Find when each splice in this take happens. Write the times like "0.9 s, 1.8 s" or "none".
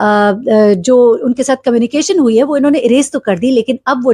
none